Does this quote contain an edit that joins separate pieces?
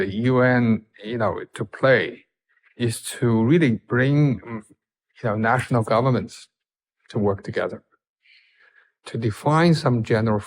no; 0 cuts

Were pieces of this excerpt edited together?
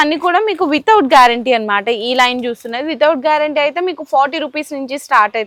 no; 0 cuts

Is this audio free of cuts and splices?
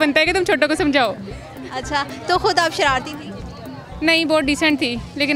yes; 0 cuts

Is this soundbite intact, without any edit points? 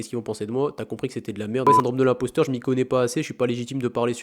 no; 1 cut; at 1.7 s

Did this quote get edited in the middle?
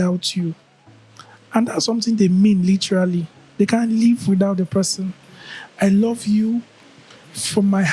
no; 0 cuts

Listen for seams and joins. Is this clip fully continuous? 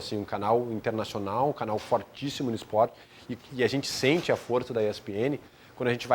yes; 0 cuts

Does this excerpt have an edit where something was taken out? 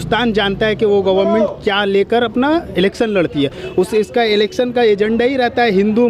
no; 0 cuts

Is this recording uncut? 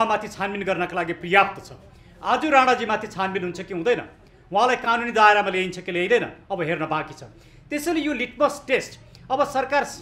yes; 0 cuts

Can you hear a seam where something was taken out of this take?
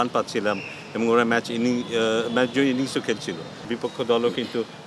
yes; 1 cut; at 3.7 s

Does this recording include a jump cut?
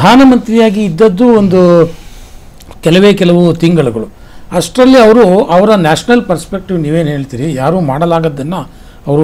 no; 0 cuts

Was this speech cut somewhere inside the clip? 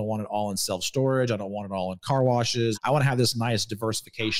yes; 1 cut; at 2.8 s

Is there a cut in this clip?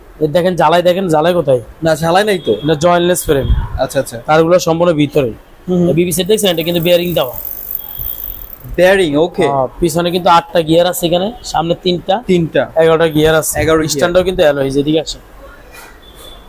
no; 0 cuts

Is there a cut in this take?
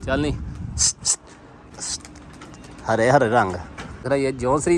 yes; 2 cuts; at 1.7 s, 4.0 s

